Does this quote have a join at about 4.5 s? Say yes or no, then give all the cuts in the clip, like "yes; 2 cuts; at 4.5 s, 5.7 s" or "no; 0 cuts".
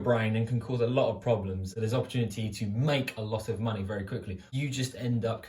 yes; 2 cuts; at 1.7 s, 4.5 s